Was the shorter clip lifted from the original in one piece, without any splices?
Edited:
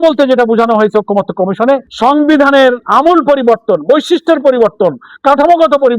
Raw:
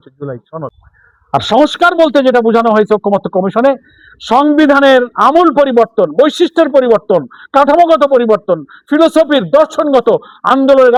no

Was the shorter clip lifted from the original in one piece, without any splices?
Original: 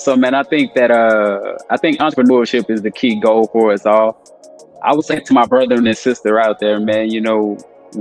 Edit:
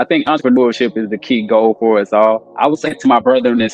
no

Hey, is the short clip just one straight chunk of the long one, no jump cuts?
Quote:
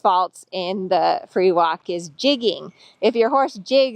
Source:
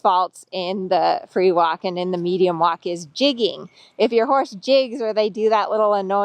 no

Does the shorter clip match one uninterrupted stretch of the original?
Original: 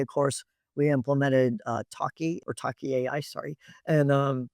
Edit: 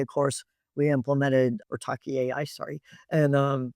no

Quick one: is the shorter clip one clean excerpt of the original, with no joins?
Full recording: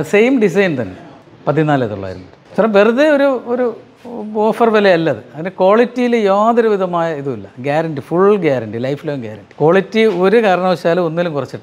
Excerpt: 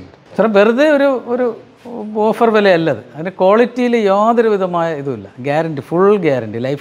yes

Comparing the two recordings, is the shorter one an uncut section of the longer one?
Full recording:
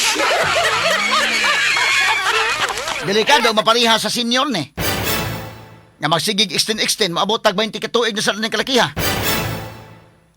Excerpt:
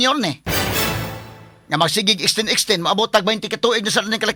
yes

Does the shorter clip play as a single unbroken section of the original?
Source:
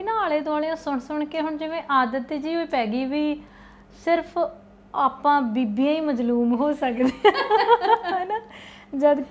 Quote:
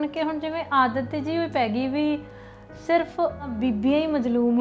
no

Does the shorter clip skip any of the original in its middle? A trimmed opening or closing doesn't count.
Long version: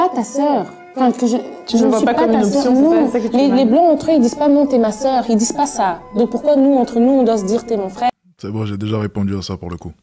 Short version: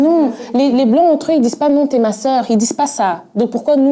no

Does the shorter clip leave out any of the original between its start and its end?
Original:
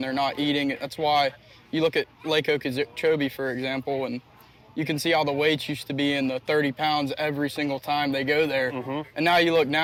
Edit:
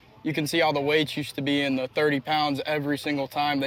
no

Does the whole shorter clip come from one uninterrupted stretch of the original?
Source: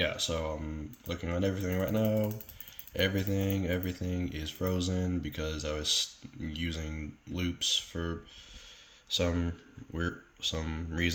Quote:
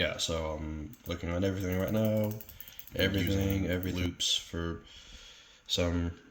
no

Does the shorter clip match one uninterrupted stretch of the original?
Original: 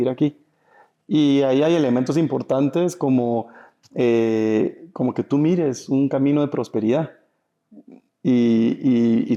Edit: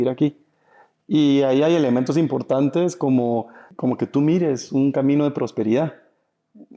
no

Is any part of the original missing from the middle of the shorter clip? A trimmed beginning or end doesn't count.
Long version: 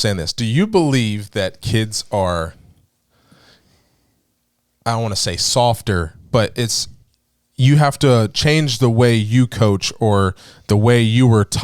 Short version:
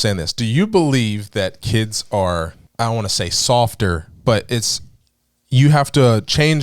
yes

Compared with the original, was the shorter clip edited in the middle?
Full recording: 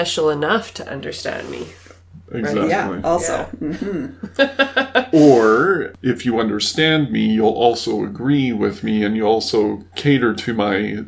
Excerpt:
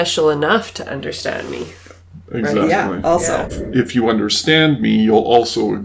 yes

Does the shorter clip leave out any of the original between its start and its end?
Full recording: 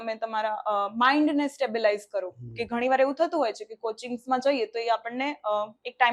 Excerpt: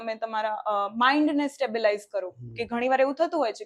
no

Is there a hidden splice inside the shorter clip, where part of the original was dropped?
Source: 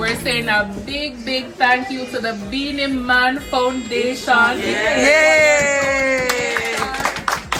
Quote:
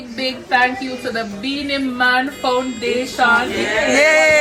no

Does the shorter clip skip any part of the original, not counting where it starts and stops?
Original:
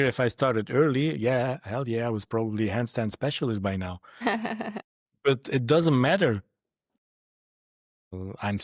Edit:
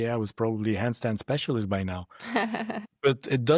yes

